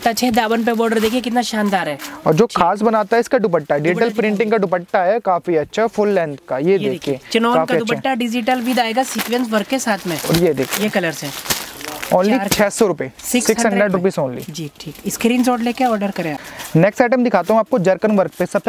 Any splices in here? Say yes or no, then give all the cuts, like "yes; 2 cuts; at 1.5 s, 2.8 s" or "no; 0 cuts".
no; 0 cuts